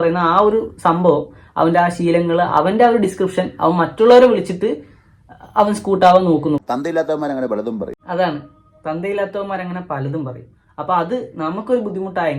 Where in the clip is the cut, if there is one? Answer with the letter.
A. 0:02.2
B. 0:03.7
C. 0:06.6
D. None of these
C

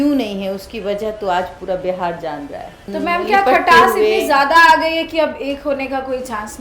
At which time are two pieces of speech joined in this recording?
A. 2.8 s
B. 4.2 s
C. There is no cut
A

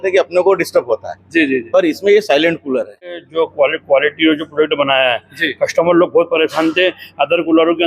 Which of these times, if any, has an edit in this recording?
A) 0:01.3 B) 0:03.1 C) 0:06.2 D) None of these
B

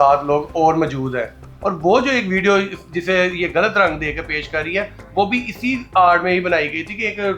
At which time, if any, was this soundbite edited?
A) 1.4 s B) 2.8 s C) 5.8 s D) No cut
A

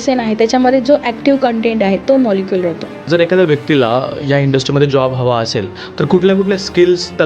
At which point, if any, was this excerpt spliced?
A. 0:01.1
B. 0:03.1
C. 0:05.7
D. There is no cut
B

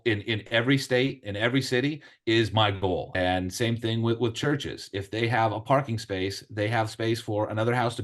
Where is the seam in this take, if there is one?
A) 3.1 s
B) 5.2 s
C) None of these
A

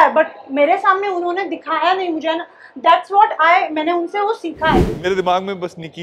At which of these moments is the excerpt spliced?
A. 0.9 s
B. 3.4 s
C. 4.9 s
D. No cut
C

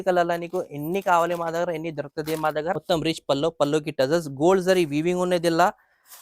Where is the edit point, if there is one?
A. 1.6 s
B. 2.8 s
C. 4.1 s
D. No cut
B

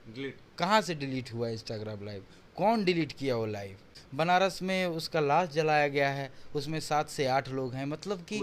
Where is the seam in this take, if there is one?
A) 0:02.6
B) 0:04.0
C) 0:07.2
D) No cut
B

